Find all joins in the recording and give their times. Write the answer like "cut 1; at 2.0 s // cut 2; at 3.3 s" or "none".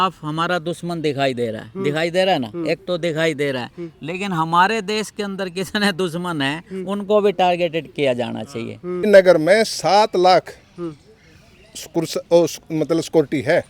cut 1; at 9.1 s